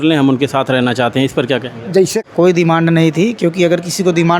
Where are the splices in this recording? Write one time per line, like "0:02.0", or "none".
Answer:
0:02.2